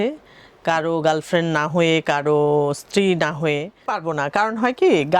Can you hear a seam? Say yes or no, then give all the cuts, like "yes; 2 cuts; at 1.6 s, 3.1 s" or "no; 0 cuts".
yes; 1 cut; at 4.0 s